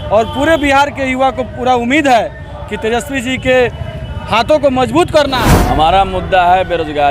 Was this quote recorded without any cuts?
no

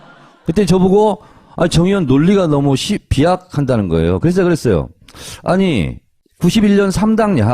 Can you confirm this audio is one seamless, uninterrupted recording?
no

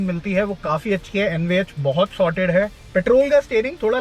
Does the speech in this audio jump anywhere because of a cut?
yes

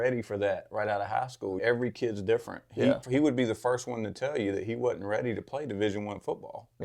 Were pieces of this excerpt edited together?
yes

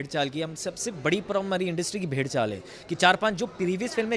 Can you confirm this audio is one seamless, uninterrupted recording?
yes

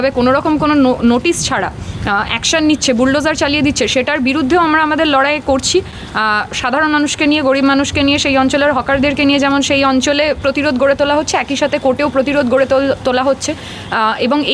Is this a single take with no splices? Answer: yes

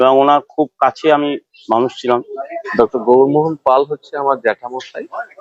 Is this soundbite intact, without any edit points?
no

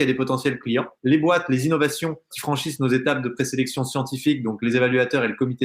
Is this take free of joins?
no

